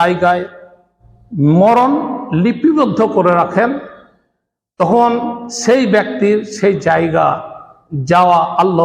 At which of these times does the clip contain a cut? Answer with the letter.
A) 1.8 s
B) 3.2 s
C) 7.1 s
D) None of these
D